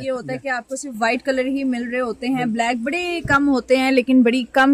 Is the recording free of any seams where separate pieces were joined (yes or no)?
yes